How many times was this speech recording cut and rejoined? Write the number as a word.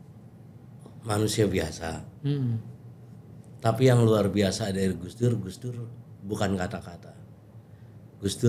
zero